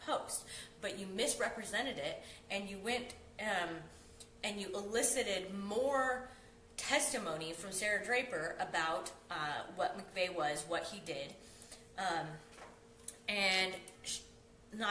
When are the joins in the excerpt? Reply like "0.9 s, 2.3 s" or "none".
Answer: 1.6 s